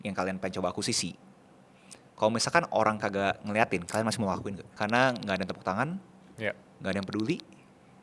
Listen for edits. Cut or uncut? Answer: cut